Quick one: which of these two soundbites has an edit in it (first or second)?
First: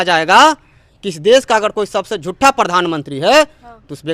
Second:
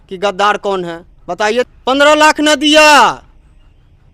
second